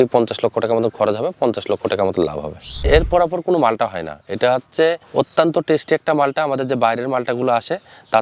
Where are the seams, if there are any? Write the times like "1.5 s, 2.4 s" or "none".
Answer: 2.7 s